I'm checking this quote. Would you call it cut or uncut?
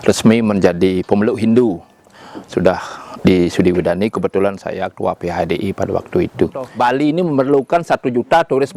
cut